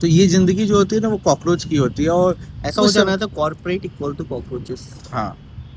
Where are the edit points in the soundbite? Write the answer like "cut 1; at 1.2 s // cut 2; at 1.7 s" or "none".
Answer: none

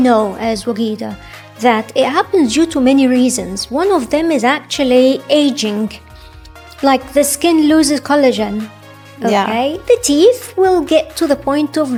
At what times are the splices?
none

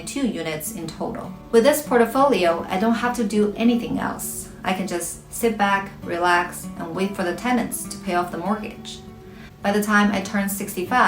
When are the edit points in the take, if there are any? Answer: cut 1; at 1.3 s

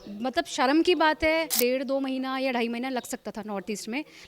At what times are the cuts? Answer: cut 1; at 1.5 s

